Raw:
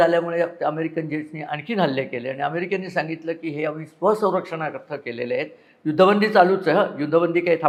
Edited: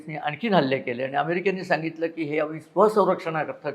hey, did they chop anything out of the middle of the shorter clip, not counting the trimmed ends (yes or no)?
no